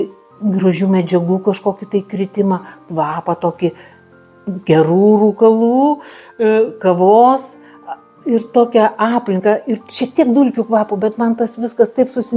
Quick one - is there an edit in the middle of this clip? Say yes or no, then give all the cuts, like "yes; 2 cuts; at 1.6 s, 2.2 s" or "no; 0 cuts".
no; 0 cuts